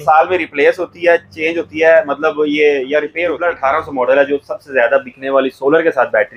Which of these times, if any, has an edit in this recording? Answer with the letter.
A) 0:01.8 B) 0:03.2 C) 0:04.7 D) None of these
B